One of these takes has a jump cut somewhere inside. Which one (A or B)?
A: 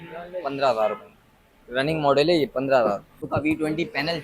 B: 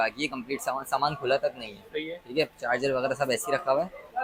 A